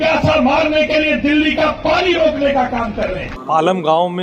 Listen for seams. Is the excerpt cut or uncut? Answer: cut